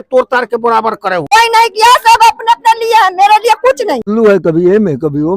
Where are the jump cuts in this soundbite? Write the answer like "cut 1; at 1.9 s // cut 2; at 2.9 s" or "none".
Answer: cut 1; at 1.2 s // cut 2; at 4.1 s